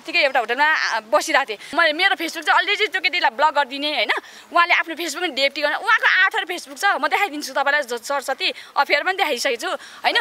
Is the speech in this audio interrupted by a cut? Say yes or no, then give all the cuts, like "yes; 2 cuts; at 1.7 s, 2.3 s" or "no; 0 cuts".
yes; 1 cut; at 1.6 s